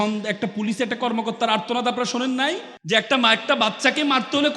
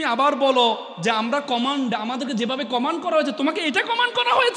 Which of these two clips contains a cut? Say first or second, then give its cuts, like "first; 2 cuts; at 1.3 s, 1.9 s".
first; 1 cut; at 2.7 s